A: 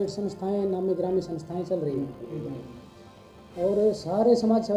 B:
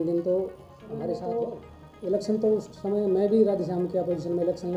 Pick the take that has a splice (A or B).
B